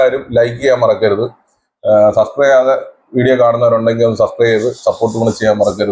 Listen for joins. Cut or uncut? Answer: uncut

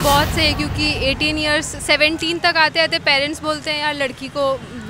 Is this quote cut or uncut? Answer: uncut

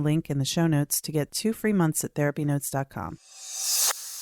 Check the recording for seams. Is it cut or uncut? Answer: cut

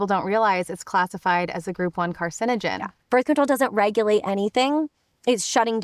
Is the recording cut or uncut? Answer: cut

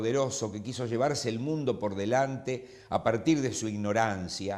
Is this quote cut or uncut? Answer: uncut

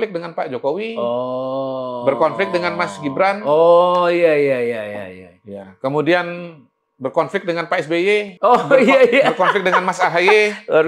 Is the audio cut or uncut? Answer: uncut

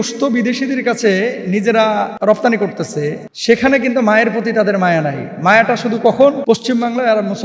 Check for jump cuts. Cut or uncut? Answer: cut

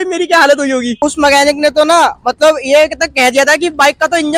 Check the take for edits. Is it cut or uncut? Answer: cut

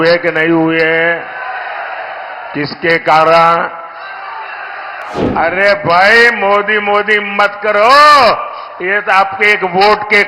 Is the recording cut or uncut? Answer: cut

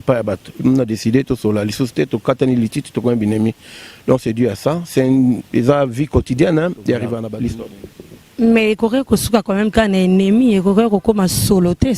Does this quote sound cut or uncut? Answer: cut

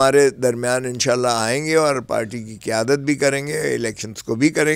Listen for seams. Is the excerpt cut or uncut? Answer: uncut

